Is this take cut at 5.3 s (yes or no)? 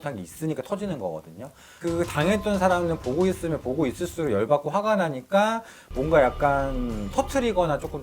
no